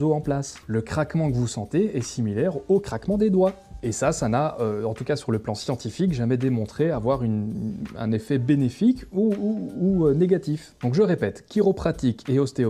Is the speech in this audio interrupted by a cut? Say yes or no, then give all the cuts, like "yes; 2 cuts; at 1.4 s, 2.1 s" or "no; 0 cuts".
yes; 2 cuts; at 3.6 s, 10.9 s